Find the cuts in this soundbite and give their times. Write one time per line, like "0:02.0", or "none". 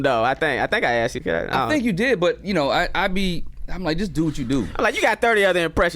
0:01.2